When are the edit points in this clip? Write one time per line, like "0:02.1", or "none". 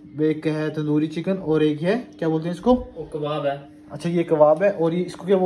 none